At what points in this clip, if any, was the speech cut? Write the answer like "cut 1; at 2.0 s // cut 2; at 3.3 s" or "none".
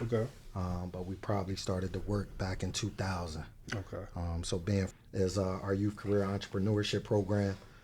cut 1; at 4.9 s